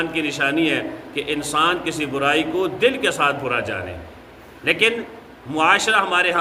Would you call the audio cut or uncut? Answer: uncut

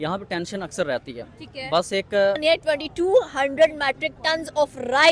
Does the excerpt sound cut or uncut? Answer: cut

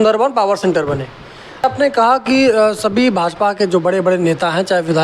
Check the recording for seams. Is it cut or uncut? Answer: cut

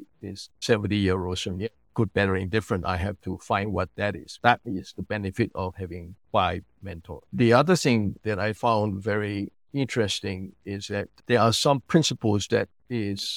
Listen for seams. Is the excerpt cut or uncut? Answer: cut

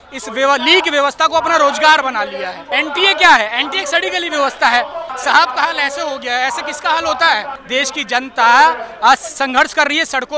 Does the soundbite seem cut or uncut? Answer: cut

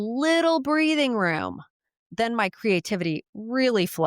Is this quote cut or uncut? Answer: cut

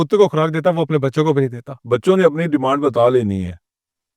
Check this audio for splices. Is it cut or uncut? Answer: cut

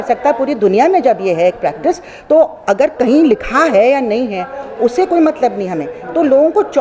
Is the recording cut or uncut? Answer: uncut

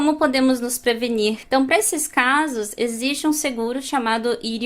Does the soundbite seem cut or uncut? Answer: cut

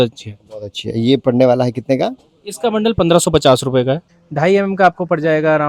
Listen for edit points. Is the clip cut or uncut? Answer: cut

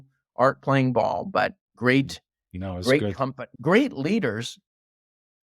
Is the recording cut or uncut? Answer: uncut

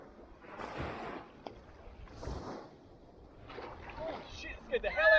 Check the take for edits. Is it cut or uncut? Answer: uncut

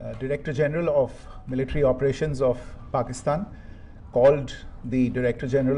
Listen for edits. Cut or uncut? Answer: uncut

